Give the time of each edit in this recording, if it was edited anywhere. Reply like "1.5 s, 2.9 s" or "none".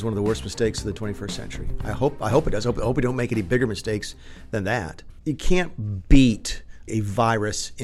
5.0 s